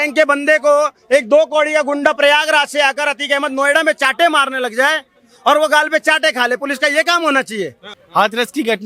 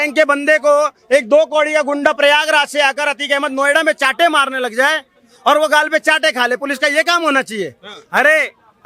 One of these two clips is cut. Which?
first; 1 cut; at 8.0 s

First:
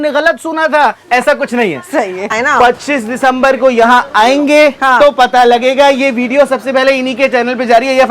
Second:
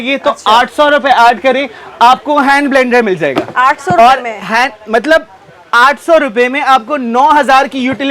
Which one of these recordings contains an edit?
first; 1 cut; at 2.3 s

